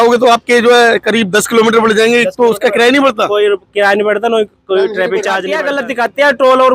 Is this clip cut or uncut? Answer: cut